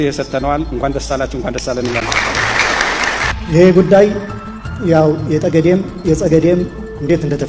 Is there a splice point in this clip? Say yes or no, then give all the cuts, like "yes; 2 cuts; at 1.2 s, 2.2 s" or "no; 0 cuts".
no; 0 cuts